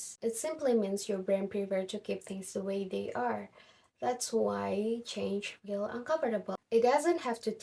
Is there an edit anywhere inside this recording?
yes; 1 cut; at 6.6 s

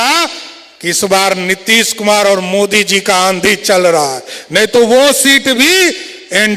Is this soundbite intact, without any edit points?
yes; 0 cuts

